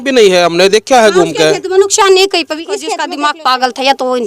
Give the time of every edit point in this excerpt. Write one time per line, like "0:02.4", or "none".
0:03.0